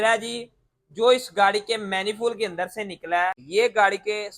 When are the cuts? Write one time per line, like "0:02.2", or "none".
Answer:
0:03.4

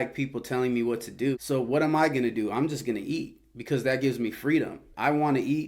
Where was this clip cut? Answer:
0:01.4

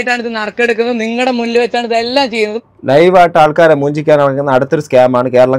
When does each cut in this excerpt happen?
none

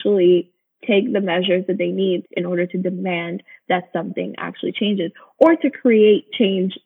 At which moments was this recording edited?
0:02.3

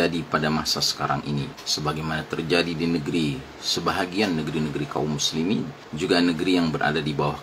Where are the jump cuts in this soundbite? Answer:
0:01.6
0:05.8

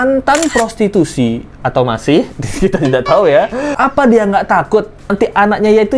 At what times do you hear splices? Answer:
0:03.7

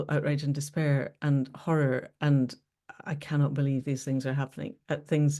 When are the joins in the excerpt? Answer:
none

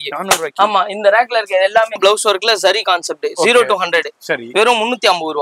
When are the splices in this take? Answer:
0:02.0

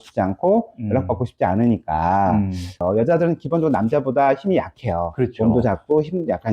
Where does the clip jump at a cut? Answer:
0:02.8

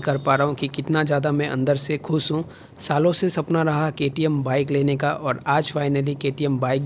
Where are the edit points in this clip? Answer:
none

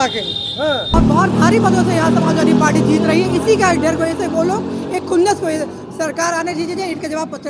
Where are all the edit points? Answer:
0:01.0

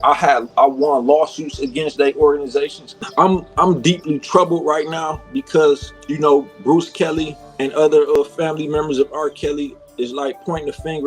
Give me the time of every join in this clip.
0:03.0

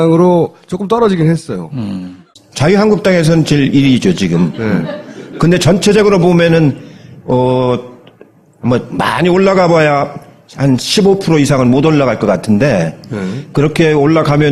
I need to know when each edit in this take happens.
none

